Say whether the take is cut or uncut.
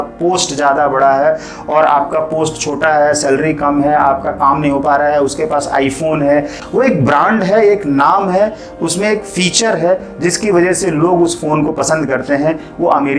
cut